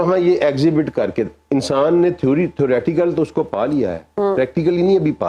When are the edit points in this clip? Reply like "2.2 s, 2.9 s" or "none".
none